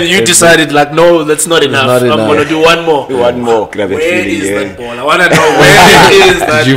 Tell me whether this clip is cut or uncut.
cut